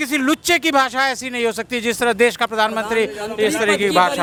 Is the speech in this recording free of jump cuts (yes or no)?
yes